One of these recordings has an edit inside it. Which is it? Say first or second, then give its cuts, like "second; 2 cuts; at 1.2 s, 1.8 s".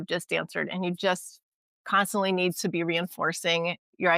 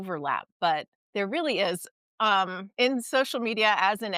second; 2 cuts; at 1.0 s, 2.6 s